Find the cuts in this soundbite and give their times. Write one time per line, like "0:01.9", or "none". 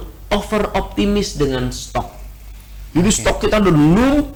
none